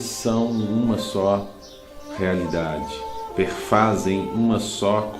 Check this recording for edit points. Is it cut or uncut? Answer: cut